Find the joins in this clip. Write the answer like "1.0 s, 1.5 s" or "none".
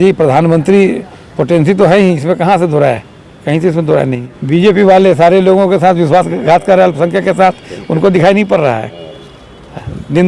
4.2 s